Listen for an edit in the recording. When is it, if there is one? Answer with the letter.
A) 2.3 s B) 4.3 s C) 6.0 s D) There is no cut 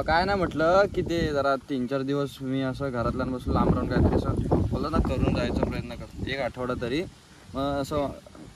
D